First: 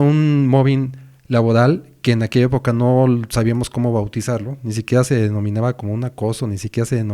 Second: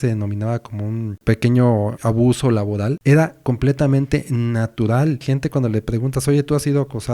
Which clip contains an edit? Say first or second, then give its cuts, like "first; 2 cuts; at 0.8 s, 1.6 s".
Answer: second; 4 cuts; at 1.2 s, 2.0 s, 3.0 s, 5.2 s